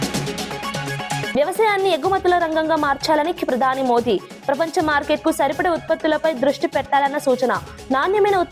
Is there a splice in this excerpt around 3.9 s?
no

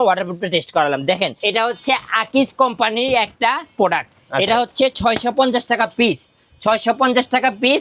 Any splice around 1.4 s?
yes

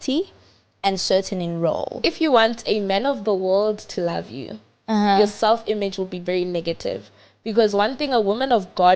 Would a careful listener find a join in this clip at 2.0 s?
yes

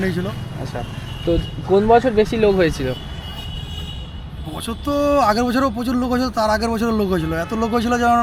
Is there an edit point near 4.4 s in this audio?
no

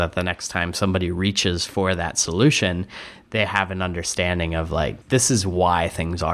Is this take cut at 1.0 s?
no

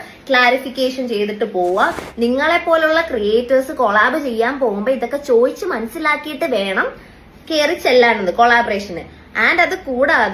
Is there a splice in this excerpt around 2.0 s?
yes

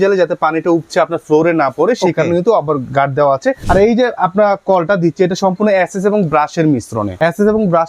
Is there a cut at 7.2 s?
yes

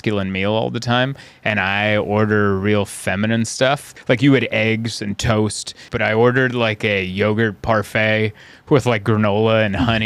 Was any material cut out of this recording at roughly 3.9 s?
yes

